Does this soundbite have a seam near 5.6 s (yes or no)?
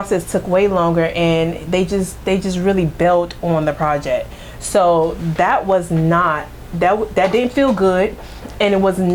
no